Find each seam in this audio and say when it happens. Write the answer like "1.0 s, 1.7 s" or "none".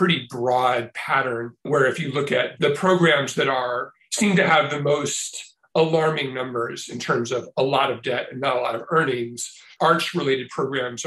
2.5 s